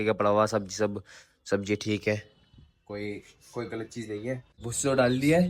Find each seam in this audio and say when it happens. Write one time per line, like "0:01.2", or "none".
0:04.5